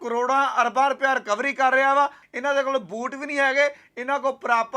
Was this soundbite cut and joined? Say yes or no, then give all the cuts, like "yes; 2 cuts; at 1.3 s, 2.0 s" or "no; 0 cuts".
yes; 1 cut; at 2.3 s